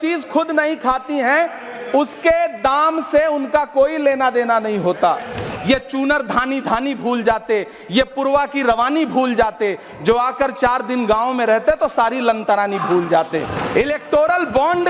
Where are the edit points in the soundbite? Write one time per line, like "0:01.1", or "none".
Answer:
0:05.5
0:13.6